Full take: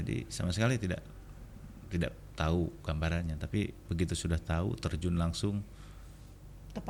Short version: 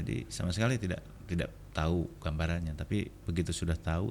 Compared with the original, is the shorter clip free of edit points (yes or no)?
no